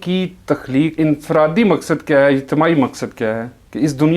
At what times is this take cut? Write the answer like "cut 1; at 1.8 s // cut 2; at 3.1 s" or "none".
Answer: cut 1; at 0.9 s